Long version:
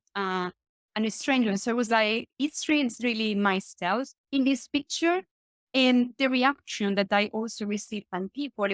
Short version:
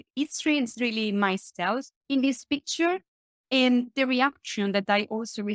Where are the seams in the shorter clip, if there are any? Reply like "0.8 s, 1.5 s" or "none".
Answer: none

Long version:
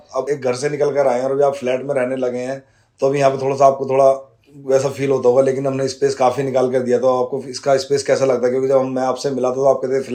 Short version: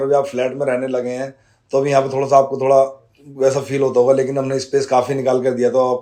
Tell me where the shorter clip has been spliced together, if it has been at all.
none

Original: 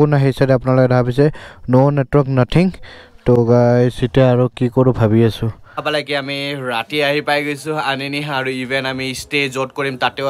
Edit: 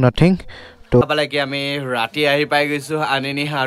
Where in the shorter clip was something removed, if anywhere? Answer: 1.0 s

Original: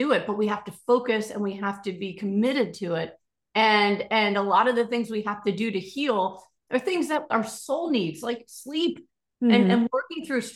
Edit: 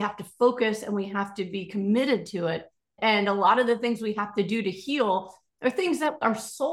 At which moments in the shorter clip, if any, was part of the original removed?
3.0 s

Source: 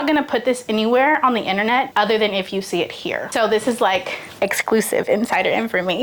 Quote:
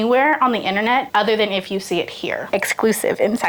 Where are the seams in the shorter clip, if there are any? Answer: 2.4 s

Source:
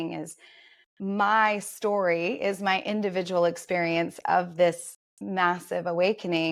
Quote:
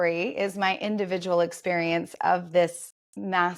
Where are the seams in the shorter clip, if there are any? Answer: none

